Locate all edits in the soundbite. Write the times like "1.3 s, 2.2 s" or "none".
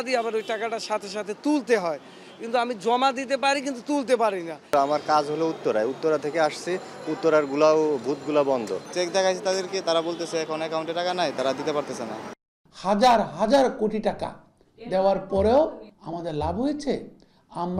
4.6 s, 8.8 s, 12.4 s